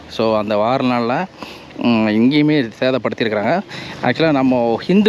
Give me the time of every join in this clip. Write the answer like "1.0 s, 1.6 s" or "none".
3.8 s